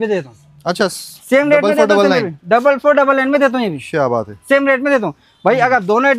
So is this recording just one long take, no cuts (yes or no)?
yes